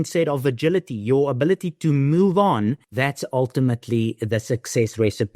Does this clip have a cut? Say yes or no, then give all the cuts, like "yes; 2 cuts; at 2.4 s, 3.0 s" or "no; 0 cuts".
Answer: yes; 1 cut; at 3.0 s